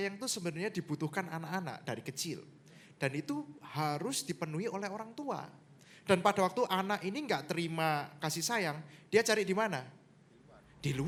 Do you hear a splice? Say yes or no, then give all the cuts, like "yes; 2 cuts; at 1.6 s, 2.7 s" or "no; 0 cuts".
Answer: no; 0 cuts